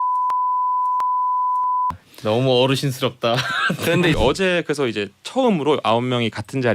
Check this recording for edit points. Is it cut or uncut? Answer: cut